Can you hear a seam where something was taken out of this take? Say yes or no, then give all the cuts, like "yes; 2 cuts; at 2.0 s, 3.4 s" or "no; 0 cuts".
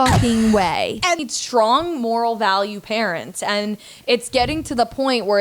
yes; 1 cut; at 1.2 s